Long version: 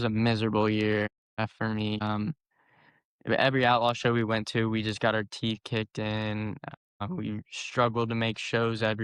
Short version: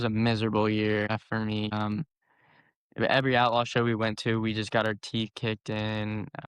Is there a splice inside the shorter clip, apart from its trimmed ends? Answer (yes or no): yes